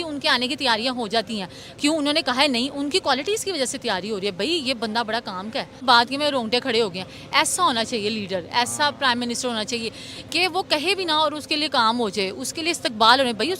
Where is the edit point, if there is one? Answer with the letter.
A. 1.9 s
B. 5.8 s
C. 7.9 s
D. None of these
B